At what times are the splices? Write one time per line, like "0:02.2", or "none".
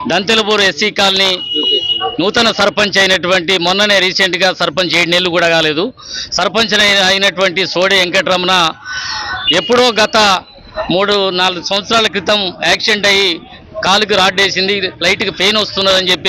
none